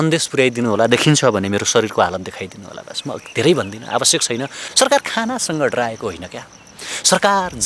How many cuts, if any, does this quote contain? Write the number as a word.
one